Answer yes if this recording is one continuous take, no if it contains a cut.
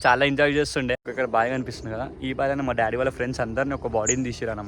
no